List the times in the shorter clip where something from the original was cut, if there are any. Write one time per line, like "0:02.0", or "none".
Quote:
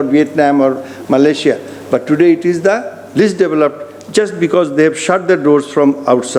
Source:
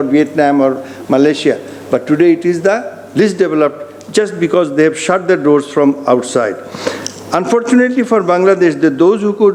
none